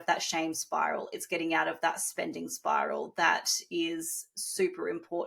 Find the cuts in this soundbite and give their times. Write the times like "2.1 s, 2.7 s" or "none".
none